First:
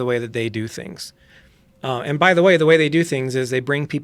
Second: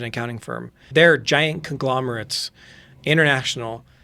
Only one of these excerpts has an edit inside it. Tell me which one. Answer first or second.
second